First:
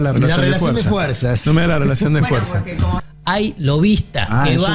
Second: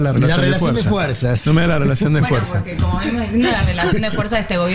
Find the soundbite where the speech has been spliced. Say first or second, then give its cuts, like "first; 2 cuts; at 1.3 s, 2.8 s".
first; 1 cut; at 3.0 s